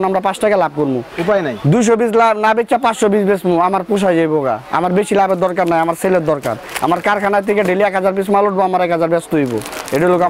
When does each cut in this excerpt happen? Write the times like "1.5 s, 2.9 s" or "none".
none